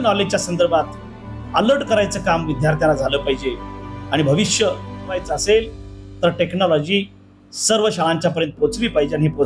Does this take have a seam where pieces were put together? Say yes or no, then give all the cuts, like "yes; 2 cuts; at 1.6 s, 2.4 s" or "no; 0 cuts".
yes; 1 cut; at 5.3 s